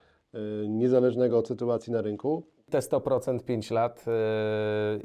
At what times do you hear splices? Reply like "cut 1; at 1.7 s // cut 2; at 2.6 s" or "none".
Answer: cut 1; at 2.7 s